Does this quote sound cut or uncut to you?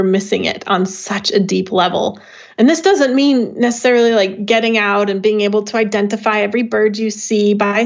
uncut